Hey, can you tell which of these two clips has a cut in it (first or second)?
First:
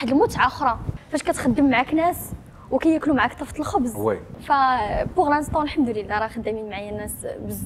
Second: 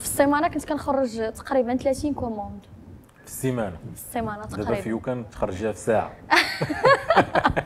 first